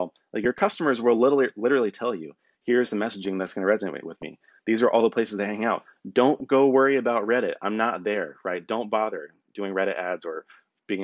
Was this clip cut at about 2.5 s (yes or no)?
yes